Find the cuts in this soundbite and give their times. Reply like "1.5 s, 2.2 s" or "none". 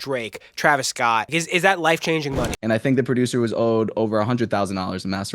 1.3 s, 2.6 s